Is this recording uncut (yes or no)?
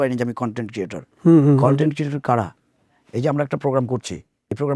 yes